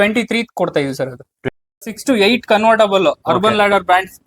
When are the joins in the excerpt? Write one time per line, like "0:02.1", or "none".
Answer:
0:01.4